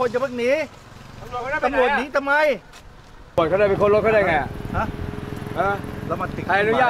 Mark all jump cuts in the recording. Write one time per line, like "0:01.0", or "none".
0:03.4